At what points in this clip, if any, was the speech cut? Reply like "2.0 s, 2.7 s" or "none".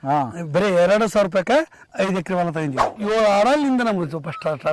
1.9 s, 3.0 s